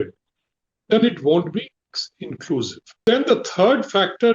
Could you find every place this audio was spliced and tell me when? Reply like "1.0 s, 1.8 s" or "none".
3.0 s